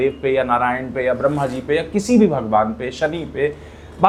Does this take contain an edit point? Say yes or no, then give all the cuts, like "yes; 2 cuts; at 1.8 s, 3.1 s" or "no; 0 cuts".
no; 0 cuts